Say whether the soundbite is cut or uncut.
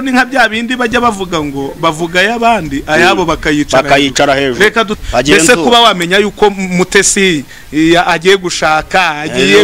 cut